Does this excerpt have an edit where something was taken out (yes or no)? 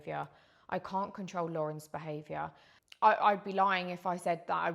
yes